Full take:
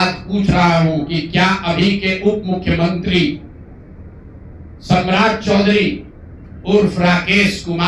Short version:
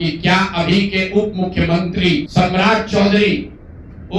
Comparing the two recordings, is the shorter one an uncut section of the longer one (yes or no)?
no